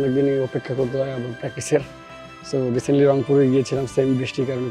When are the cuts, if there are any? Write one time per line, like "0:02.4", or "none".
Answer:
none